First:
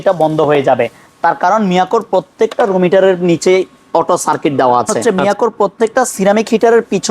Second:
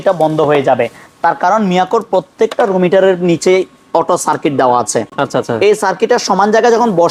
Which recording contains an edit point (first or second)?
first